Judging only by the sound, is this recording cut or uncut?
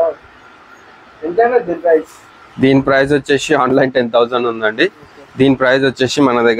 uncut